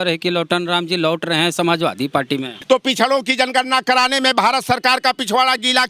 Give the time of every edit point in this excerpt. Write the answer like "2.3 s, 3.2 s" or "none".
2.5 s